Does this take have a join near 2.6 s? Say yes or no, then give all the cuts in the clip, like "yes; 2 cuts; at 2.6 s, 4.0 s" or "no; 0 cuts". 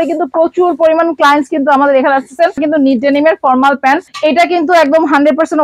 yes; 2 cuts; at 2.6 s, 4.1 s